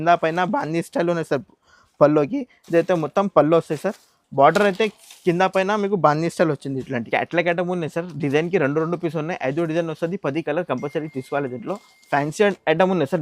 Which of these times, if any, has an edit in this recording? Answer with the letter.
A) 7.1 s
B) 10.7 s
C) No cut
A